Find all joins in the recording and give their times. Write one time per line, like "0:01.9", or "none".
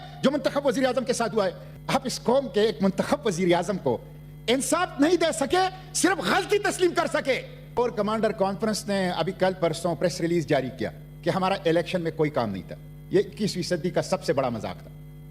0:01.7
0:07.8

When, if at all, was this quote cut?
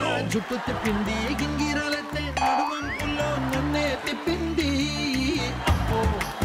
none

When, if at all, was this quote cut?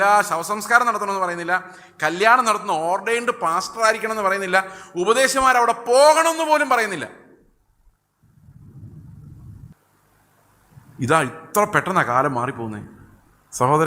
0:09.7

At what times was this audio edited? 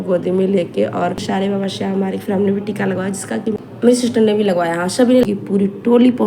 0:01.2
0:03.5
0:05.2

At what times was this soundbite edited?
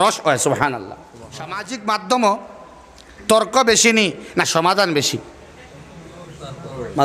0:01.7

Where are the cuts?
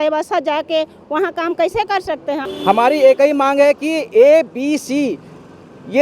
0:02.5

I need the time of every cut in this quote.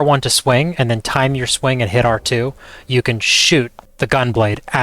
0:03.8

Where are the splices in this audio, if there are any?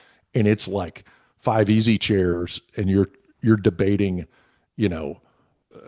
none

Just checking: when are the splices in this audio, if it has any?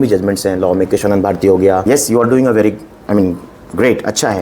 0:01.8

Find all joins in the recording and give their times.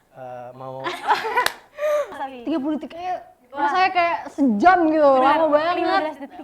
0:02.2

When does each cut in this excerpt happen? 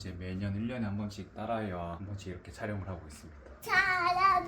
0:02.0
0:03.5

